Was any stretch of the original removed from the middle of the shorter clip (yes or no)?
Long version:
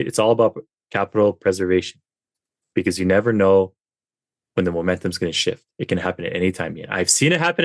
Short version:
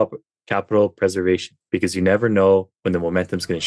yes